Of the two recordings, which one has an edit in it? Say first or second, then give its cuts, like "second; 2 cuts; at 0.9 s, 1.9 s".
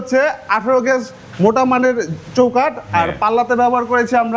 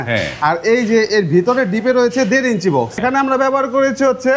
second; 1 cut; at 3.0 s